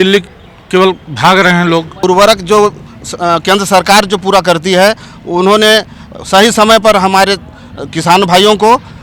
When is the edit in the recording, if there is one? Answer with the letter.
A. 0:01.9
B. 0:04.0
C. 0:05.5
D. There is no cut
A